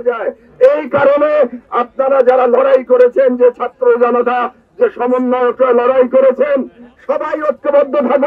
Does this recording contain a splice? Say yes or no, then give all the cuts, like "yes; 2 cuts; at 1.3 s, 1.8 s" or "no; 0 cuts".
no; 0 cuts